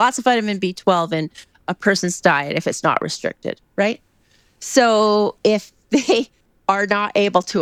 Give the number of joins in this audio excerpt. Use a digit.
0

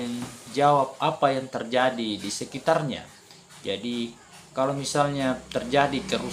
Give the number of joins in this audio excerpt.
0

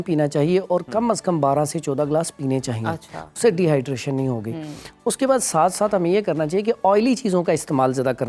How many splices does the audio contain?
0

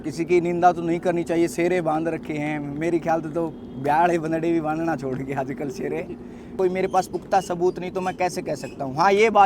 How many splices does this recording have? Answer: 1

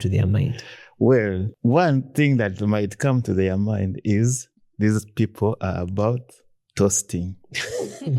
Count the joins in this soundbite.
1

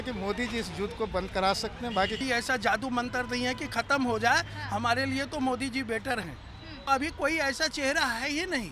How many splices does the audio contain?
2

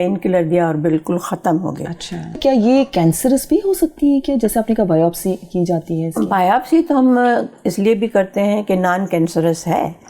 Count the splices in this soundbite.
1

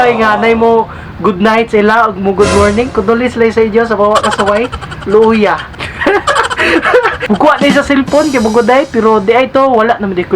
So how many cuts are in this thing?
2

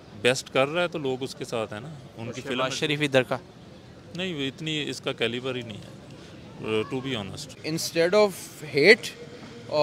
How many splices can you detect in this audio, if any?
1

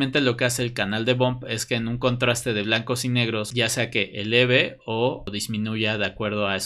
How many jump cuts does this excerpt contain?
2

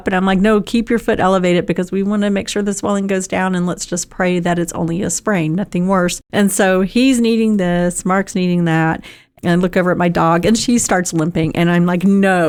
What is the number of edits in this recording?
0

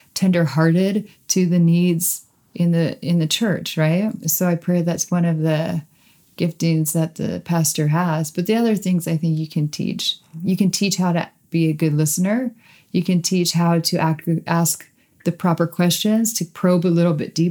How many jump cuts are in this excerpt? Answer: 2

